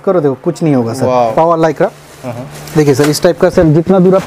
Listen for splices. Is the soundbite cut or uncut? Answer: cut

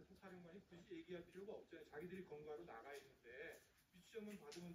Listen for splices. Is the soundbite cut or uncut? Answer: uncut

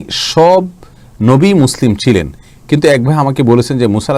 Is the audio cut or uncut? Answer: uncut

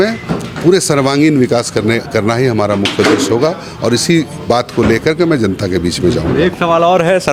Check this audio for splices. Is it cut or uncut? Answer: uncut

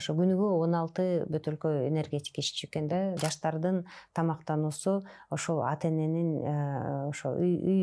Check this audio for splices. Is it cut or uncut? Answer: cut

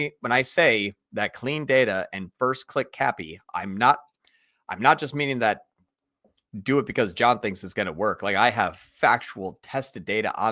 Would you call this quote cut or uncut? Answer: uncut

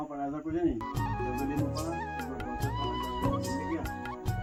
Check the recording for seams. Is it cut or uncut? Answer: uncut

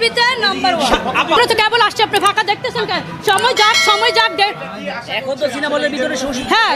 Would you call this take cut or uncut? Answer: cut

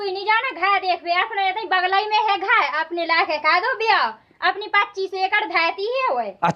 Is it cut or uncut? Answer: uncut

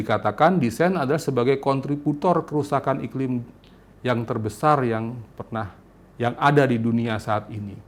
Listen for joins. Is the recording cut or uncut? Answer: uncut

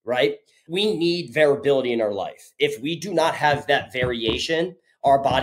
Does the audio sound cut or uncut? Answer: uncut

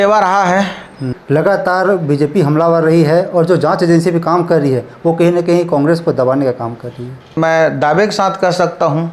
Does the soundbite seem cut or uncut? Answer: cut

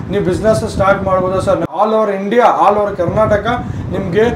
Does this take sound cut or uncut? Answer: cut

